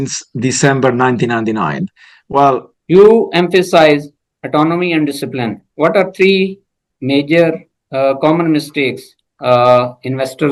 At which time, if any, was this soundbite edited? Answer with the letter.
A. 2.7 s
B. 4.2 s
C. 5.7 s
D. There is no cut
A